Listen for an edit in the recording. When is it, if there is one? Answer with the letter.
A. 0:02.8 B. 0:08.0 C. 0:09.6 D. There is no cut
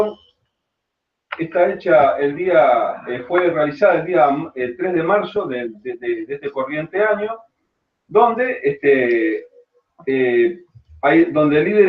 A